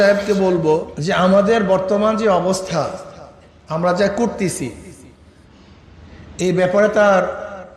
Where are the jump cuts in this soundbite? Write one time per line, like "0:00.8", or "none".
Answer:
0:00.9

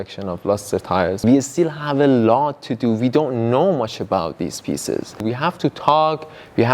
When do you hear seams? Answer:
0:01.2
0:05.2

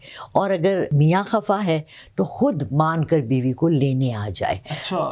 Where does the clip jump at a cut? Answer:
0:00.9

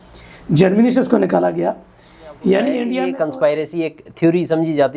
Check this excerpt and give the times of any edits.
0:03.1

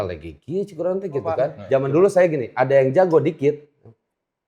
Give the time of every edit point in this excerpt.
0:01.6

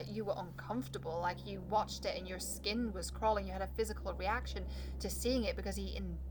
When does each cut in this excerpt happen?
none

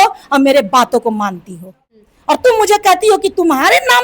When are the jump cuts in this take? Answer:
0:02.4

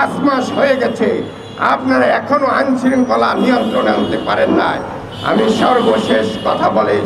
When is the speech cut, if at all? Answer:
none

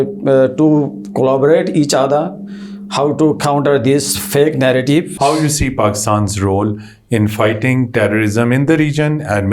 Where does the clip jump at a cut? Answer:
0:05.1

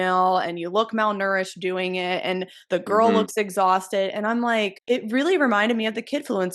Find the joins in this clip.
0:04.8

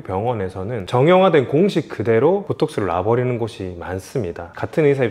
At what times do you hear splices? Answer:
none

